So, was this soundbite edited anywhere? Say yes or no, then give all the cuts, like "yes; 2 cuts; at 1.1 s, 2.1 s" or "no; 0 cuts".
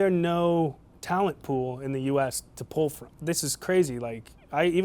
yes; 1 cut; at 3.0 s